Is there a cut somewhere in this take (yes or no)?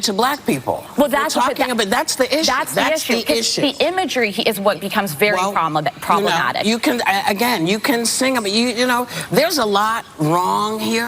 yes